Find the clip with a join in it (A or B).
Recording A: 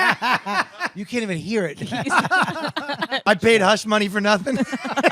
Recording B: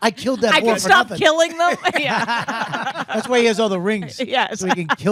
A